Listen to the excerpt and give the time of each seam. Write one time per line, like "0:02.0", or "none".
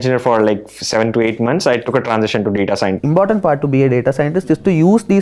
0:03.0